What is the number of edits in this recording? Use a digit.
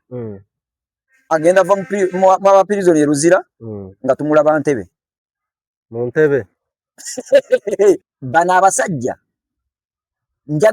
1